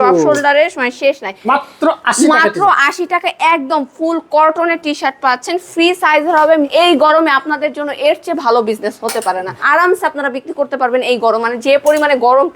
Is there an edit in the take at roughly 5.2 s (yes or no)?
no